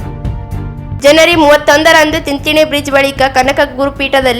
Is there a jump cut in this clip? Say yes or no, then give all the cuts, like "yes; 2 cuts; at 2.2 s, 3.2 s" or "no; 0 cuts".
yes; 1 cut; at 0.9 s